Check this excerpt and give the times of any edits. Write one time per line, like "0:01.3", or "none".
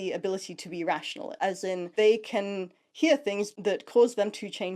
0:01.3
0:03.5